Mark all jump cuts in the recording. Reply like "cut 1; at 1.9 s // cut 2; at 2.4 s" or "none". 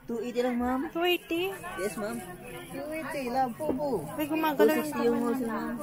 none